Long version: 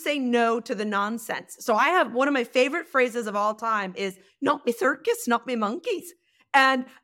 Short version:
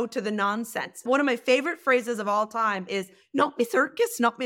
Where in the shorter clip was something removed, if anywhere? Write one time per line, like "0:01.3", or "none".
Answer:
0:01.0